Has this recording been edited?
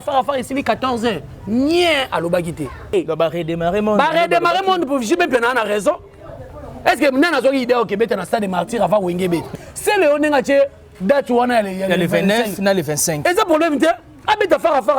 yes; 2 cuts; at 2.9 s, 9.5 s

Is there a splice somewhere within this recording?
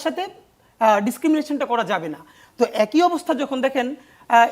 no; 0 cuts

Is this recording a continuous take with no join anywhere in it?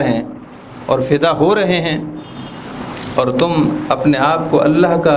yes; 0 cuts

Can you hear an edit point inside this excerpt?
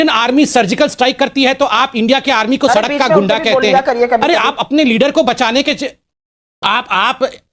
no; 0 cuts

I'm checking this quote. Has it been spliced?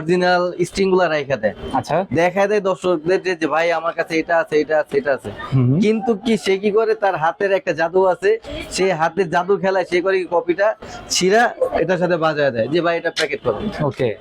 no; 0 cuts

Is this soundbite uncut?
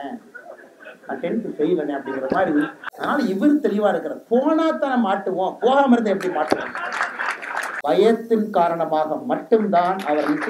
no; 2 cuts; at 2.9 s, 7.7 s

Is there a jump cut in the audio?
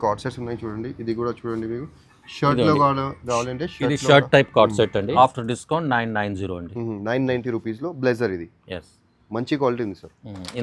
yes; 1 cut; at 5.1 s

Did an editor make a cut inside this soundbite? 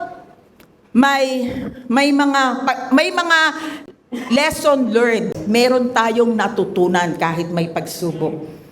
yes; 1 cut; at 5.3 s

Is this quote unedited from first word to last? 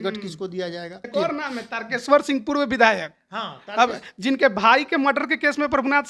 no; 1 cut; at 0.9 s

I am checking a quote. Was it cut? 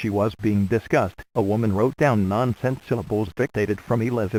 no; 0 cuts

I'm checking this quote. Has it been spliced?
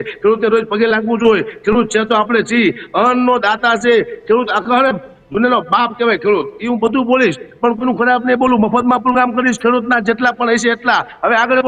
no; 0 cuts

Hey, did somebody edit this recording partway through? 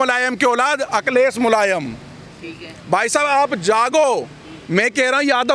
no; 0 cuts

